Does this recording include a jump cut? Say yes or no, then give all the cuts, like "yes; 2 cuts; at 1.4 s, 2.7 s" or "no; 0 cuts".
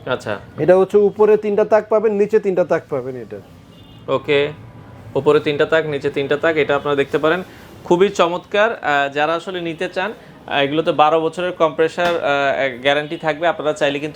no; 0 cuts